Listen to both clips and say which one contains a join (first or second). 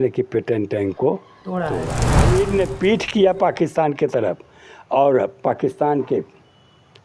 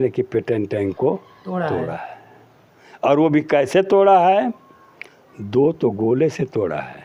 first